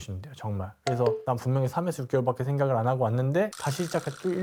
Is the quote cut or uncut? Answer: uncut